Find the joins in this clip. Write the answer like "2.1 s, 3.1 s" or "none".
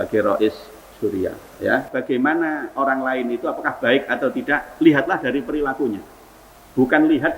1.9 s